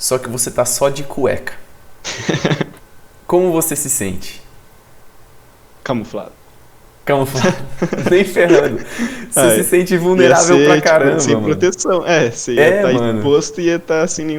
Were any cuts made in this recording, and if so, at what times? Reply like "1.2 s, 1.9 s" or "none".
none